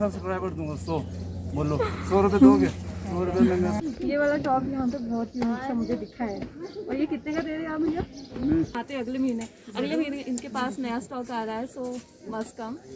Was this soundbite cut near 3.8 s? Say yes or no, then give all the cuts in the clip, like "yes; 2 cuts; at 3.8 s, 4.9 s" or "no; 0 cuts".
yes; 2 cuts; at 3.8 s, 8.7 s